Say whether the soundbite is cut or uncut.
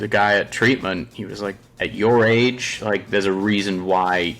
cut